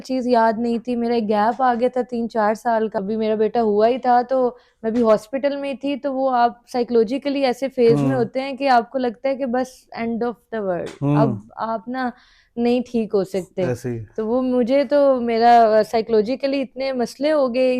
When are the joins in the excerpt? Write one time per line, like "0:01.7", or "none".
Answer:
0:03.0

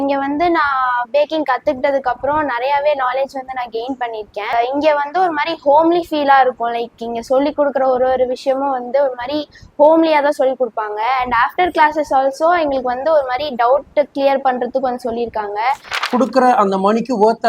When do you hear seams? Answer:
0:16.0

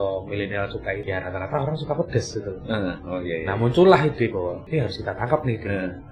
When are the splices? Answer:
0:01.0
0:04.6

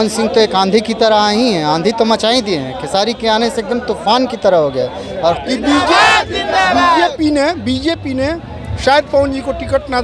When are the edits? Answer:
0:05.4

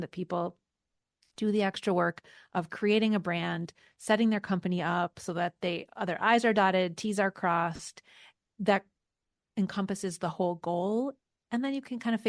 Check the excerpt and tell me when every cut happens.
none

